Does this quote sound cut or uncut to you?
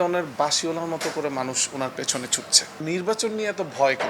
cut